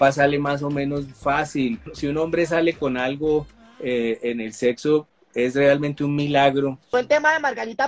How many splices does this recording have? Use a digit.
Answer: 2